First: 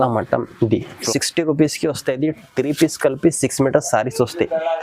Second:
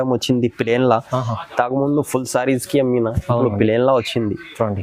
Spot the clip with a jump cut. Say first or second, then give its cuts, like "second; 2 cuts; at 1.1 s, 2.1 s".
first; 1 cut; at 1.0 s